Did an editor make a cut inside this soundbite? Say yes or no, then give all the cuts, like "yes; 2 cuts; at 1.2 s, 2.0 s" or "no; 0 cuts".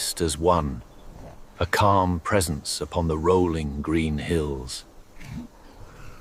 no; 0 cuts